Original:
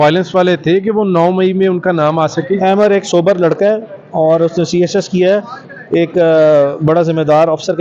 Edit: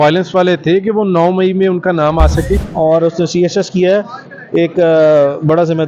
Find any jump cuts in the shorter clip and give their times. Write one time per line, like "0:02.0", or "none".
0:02.6